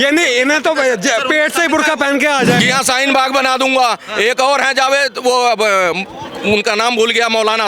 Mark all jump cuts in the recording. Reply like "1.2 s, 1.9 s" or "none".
2.6 s